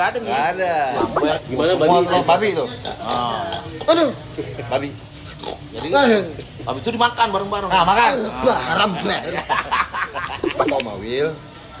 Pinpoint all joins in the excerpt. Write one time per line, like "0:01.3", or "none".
0:01.1
0:10.4